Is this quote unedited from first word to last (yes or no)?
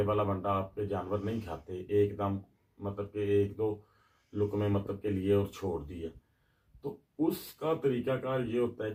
yes